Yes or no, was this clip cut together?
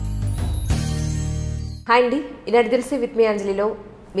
no